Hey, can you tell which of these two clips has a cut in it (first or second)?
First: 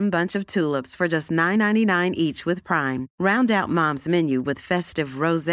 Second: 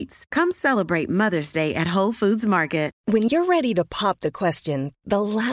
second